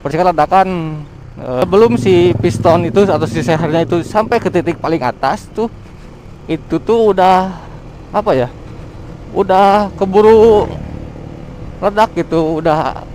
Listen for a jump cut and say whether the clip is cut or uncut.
cut